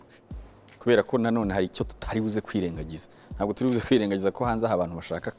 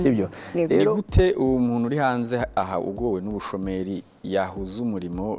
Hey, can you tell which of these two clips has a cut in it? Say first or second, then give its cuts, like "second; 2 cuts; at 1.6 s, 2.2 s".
second; 1 cut; at 1.0 s